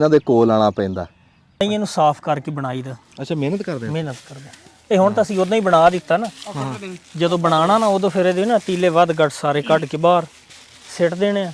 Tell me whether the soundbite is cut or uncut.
cut